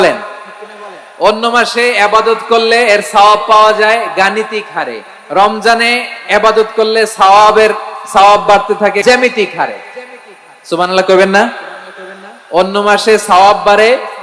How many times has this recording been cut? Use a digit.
1